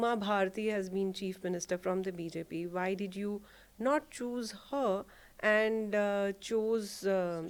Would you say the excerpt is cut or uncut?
uncut